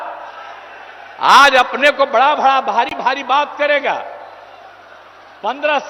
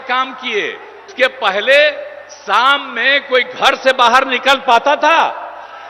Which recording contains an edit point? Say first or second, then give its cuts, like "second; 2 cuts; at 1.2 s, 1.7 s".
second; 1 cut; at 1.1 s